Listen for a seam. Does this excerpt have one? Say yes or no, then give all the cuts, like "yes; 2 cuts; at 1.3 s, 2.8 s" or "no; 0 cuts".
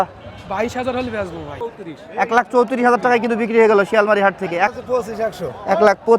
yes; 2 cuts; at 1.6 s, 4.7 s